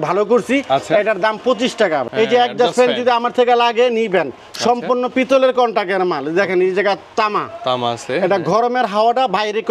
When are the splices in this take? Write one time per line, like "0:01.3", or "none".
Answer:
0:02.0